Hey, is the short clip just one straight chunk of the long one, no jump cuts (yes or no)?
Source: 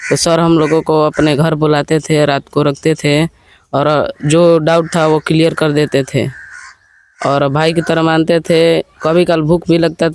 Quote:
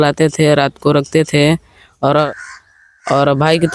no